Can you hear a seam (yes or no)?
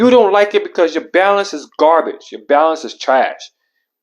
no